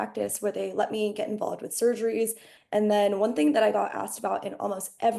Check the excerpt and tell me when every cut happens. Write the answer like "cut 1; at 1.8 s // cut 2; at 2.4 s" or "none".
cut 1; at 2.5 s